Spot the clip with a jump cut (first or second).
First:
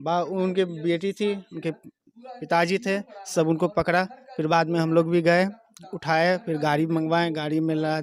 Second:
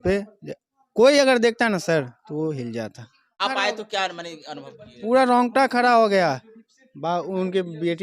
second